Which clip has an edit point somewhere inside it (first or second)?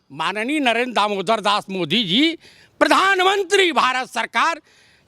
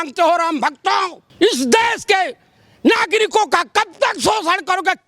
second